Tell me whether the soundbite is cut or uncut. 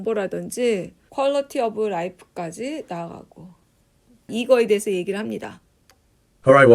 cut